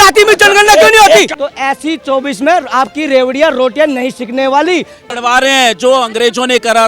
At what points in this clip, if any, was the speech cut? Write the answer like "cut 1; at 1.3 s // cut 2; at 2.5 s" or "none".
cut 1; at 1.3 s // cut 2; at 5.0 s